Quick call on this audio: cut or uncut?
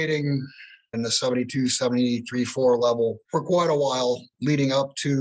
cut